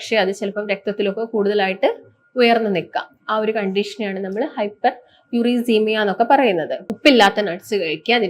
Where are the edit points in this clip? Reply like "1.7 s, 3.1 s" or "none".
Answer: 6.8 s